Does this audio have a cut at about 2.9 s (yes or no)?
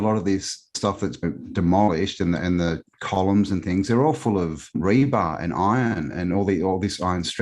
no